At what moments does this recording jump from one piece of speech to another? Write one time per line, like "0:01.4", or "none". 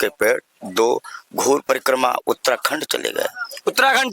0:01.6